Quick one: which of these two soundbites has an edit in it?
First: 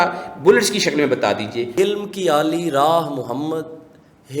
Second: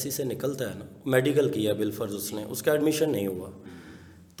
first; 1 cut; at 1.8 s

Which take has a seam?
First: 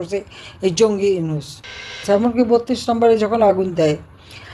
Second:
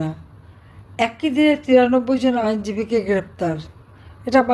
first; 1 cut; at 2.0 s

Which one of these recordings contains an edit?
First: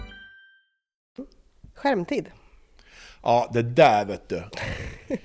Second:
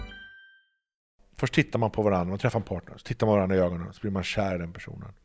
second; 1 cut; at 1.2 s

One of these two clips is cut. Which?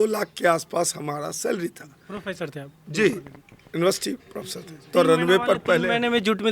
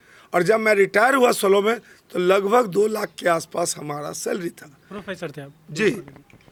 first; 1 cut; at 4.9 s

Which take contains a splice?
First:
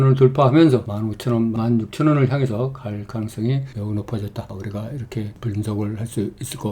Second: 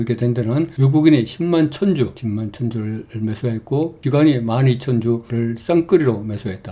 first; 2 cuts; at 1.5 s, 5.3 s

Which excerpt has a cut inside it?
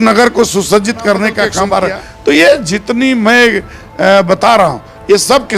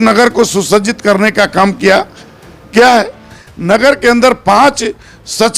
first; 1 cut; at 1.6 s

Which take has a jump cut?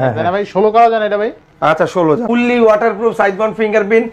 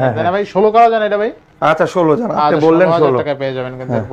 first; 1 cut; at 2.2 s

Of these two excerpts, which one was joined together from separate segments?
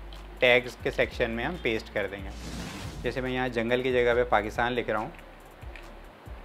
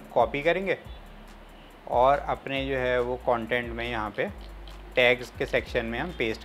first; 1 cut; at 2.9 s

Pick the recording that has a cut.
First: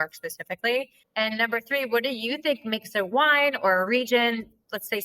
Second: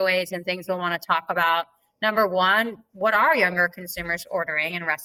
first; 1 cut; at 1.0 s

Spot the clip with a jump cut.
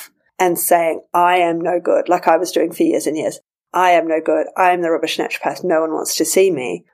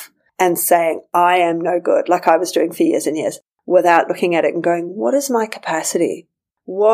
second; 1 cut; at 3.5 s

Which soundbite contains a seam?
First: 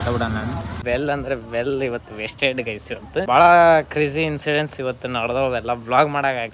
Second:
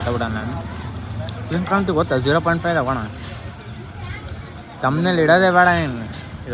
first; 2 cuts; at 0.8 s, 3.2 s

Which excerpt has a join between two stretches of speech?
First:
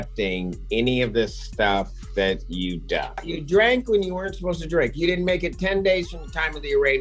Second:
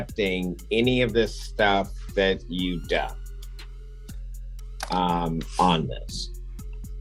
first; 1 cut; at 3.3 s

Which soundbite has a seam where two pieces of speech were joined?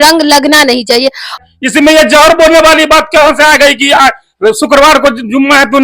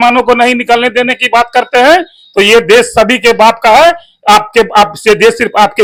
first; 1 cut; at 1.4 s

